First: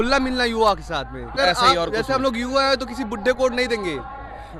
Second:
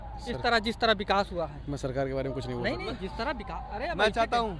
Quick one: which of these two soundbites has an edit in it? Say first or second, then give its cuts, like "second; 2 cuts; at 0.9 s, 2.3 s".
first; 1 cut; at 1.3 s